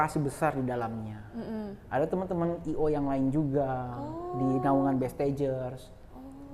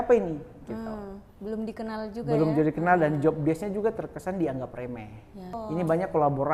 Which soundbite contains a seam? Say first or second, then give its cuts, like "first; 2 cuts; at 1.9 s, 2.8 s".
second; 1 cut; at 5.6 s